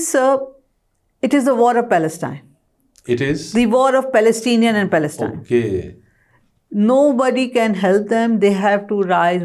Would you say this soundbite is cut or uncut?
uncut